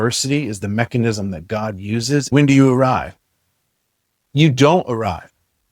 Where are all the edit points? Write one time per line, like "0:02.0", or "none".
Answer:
0:02.3